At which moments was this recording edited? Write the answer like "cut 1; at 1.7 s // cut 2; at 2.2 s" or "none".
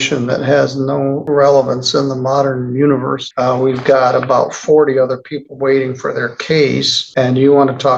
cut 1; at 1.2 s // cut 2; at 3.2 s // cut 3; at 7.0 s